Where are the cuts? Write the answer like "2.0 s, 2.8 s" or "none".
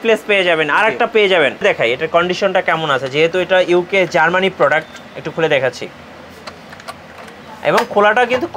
1.6 s